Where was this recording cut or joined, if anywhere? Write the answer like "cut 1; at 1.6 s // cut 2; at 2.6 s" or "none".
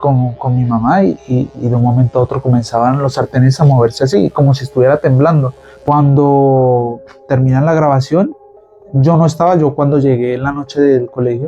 cut 1; at 5.6 s